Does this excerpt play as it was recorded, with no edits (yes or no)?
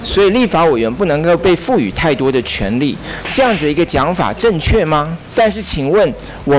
no